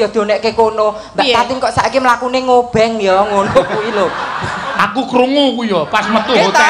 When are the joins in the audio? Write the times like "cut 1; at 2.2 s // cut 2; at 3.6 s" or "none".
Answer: cut 1; at 4.7 s